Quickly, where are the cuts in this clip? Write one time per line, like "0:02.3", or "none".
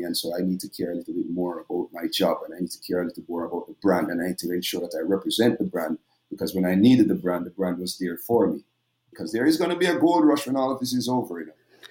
0:09.1